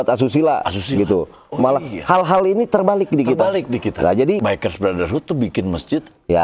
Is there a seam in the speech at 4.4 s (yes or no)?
yes